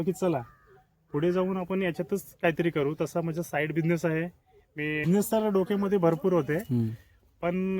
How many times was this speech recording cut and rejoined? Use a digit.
1